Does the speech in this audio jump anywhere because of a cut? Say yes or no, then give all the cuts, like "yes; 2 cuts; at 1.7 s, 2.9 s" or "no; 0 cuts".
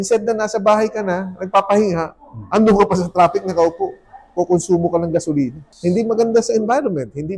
yes; 1 cut; at 5.6 s